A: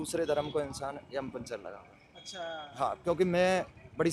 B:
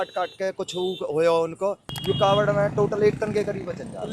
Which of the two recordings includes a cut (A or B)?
B